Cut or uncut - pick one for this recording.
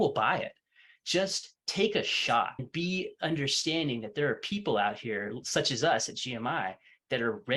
cut